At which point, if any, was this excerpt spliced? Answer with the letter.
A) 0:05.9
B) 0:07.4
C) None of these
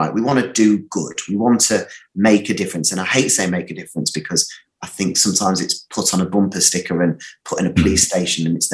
C